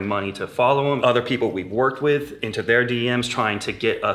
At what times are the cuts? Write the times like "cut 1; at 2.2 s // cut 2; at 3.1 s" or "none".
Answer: cut 1; at 1.0 s